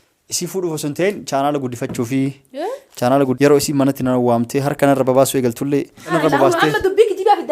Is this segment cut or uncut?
cut